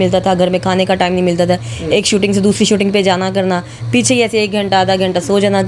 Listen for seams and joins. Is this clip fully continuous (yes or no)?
yes